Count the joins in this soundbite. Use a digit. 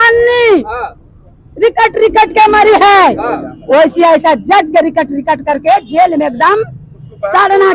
0